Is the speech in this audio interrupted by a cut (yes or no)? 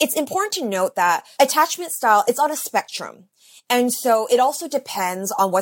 yes